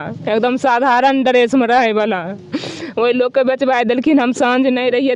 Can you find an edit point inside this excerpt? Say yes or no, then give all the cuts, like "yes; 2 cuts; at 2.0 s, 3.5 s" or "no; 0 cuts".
no; 0 cuts